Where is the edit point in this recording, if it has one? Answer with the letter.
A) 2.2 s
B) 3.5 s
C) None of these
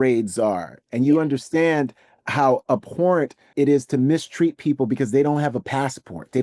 B